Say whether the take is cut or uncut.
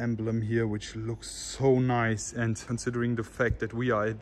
cut